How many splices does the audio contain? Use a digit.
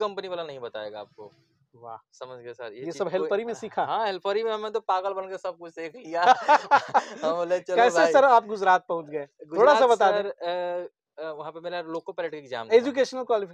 0